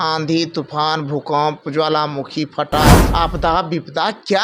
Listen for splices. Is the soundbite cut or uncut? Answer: cut